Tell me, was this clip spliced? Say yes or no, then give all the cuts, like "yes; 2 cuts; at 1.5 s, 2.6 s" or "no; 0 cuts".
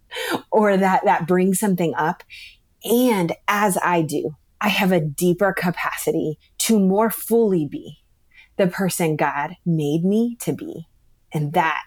yes; 1 cut; at 6.5 s